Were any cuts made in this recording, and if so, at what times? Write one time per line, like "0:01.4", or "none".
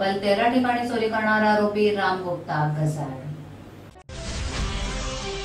0:04.0